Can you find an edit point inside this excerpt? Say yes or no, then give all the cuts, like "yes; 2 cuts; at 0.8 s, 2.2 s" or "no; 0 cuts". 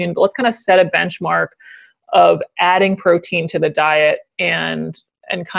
no; 0 cuts